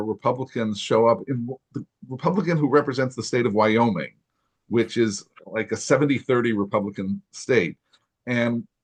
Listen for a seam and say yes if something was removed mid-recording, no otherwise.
no